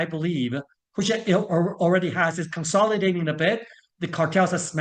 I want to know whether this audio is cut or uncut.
uncut